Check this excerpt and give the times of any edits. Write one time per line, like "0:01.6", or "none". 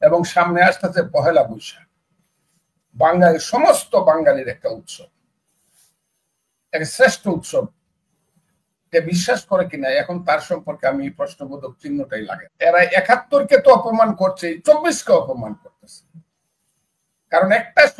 0:12.4